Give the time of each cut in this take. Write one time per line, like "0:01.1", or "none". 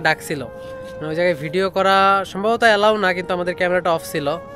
none

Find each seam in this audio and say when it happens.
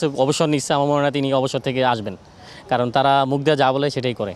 none

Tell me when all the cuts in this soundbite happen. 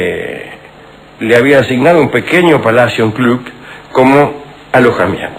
0:02.0

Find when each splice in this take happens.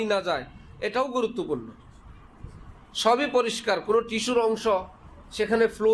none

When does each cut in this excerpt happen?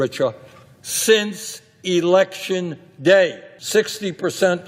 0:03.5

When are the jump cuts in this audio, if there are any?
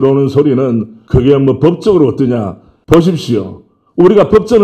none

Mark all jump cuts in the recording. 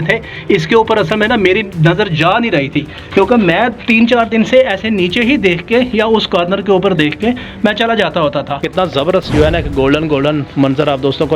0:08.6

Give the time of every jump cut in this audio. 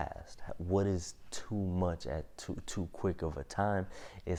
none

